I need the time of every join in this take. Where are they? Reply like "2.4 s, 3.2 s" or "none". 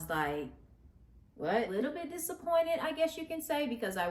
1.7 s